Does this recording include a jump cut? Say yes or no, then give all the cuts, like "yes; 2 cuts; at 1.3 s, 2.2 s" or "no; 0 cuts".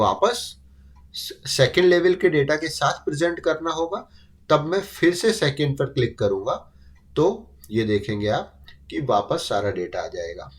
no; 0 cuts